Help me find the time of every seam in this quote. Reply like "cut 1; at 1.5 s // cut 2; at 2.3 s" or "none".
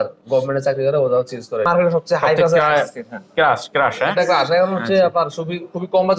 cut 1; at 1.7 s